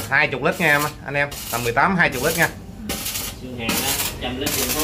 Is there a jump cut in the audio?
no; 0 cuts

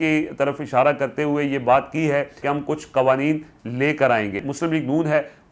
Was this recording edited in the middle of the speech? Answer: yes; 2 cuts; at 2.4 s, 4.5 s

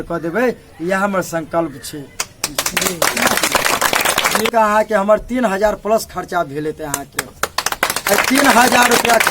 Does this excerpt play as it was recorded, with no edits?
no; 1 cut; at 4.5 s

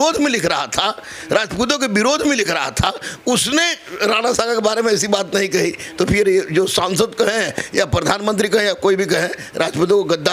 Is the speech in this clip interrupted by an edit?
no; 0 cuts

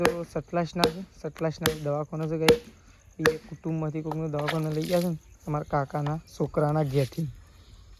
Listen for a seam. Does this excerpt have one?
no; 0 cuts

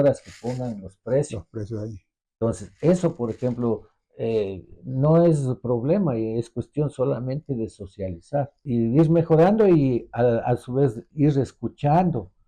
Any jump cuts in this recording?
yes; 1 cut; at 8.6 s

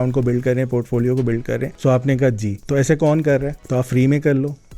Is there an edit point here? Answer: yes; 3 cuts; at 1.7 s, 2.5 s, 3.6 s

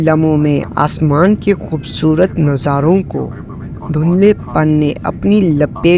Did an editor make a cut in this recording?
no; 0 cuts

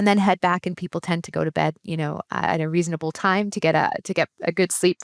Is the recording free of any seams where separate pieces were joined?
yes; 0 cuts

